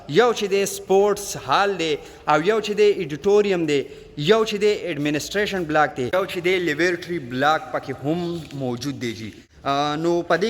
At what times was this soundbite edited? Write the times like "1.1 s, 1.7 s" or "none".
6.1 s, 9.5 s